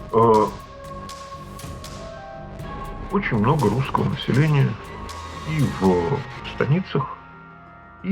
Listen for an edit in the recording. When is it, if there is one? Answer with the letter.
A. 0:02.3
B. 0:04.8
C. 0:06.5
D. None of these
D